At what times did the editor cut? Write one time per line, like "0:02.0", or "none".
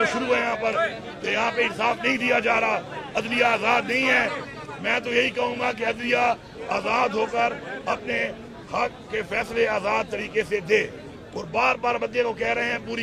none